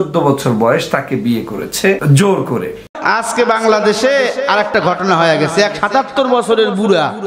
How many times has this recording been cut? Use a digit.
2